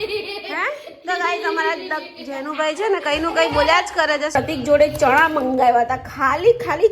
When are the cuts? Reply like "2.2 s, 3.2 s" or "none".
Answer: 4.3 s

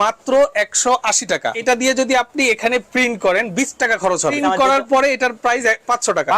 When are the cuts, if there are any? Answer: 1.5 s, 4.4 s

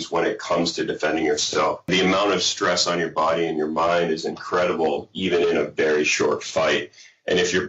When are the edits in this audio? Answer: 1.9 s

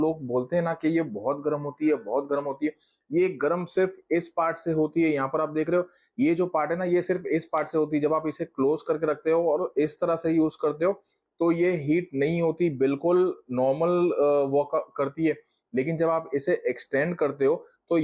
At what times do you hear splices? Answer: none

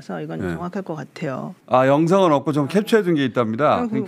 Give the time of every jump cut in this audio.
none

